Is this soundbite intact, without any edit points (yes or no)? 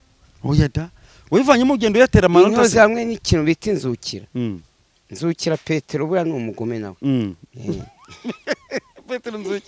yes